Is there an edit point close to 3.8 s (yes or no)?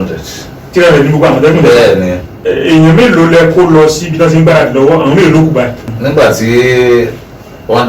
no